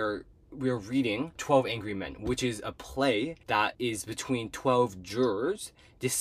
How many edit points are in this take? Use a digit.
2